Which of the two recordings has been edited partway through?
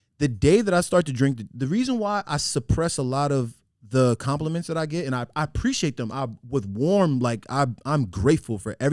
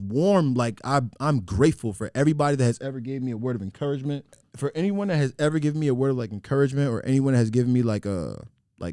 second; 1 cut; at 4.5 s

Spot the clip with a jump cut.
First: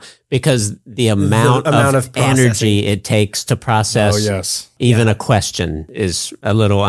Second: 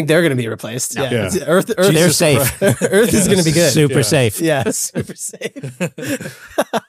first; 2 cuts; at 4.7 s, 6.0 s

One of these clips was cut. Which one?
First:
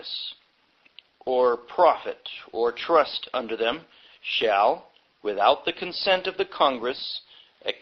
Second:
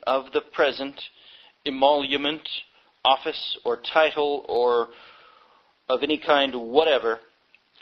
first; 1 cut; at 3.7 s

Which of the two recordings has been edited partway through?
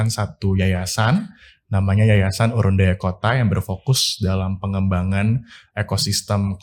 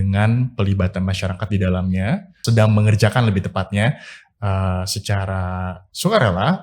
second; 1 cut; at 2.4 s

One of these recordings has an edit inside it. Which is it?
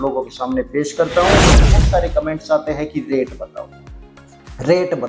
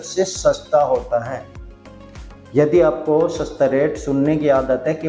first; 1 cut; at 1.6 s

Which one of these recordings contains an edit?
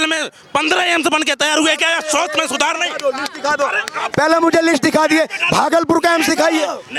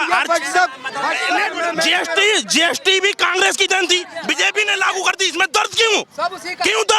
second; 1 cut; at 1.4 s

